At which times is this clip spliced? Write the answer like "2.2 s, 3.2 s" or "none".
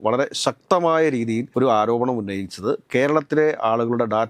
1.5 s

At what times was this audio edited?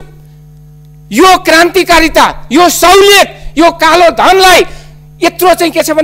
none

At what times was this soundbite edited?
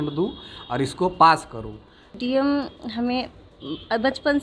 2.1 s

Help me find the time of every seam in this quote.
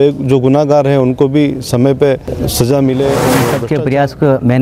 2.4 s, 3.5 s

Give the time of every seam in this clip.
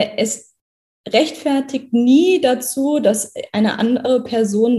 none

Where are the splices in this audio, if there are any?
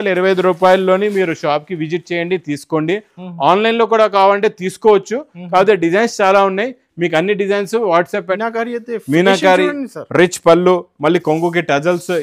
8.4 s

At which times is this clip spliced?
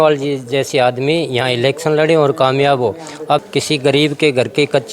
3.4 s

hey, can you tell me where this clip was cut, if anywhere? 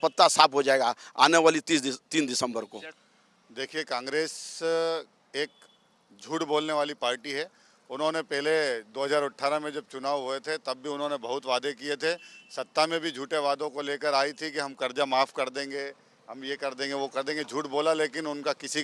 2.8 s

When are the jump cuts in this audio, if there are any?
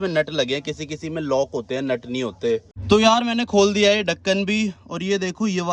2.7 s

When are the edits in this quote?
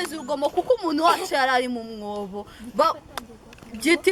none

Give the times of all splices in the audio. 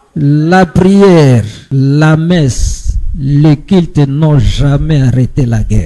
1.6 s

